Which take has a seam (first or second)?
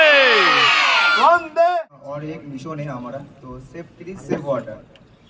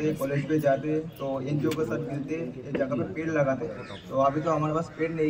first